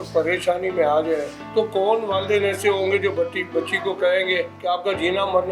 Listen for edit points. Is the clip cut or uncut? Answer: cut